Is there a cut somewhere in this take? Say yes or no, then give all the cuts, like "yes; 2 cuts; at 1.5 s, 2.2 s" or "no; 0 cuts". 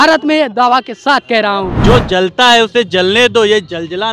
yes; 1 cut; at 1.7 s